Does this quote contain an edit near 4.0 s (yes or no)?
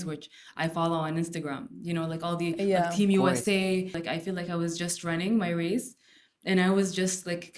yes